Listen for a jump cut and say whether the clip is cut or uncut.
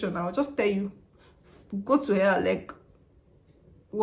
uncut